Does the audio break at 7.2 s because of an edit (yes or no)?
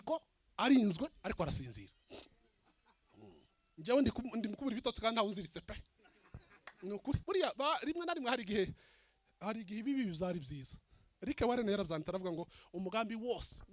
yes